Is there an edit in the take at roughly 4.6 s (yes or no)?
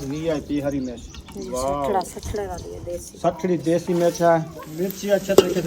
yes